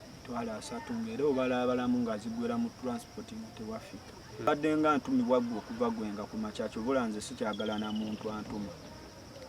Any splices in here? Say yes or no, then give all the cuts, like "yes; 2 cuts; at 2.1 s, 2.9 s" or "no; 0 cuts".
yes; 1 cut; at 4.5 s